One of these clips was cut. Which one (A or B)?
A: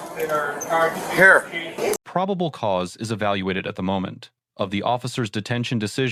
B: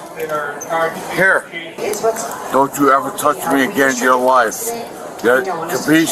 B